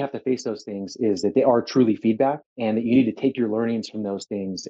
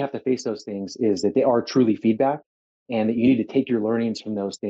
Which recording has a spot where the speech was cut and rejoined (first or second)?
first